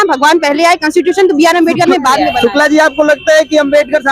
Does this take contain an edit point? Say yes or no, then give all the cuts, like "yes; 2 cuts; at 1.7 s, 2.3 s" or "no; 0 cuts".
yes; 1 cut; at 2.3 s